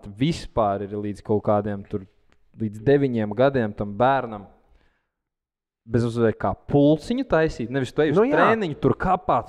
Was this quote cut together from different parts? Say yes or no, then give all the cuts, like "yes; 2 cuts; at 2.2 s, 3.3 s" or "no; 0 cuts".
no; 0 cuts